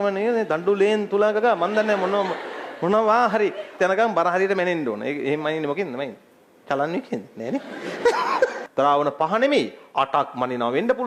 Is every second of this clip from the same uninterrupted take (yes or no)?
no